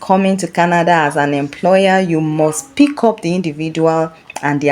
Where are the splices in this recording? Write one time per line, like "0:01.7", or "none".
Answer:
none